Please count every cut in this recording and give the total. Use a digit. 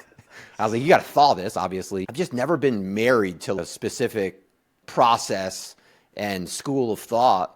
3